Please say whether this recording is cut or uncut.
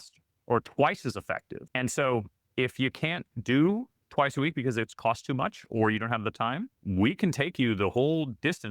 cut